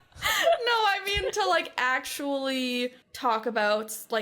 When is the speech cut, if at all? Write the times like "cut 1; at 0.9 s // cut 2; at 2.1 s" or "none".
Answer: cut 1; at 3.1 s